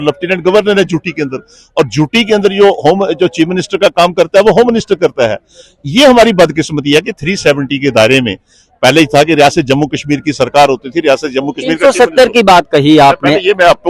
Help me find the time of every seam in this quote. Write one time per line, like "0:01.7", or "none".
none